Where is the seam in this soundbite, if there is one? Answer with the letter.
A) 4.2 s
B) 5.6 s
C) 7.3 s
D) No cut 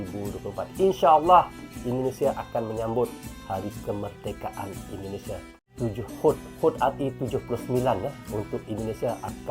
B